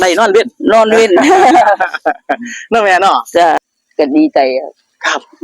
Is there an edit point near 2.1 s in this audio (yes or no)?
no